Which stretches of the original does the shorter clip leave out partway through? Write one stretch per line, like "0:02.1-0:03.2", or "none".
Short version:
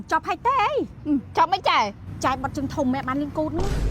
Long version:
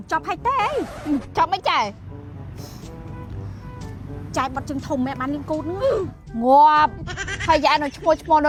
0:02.0-0:04.2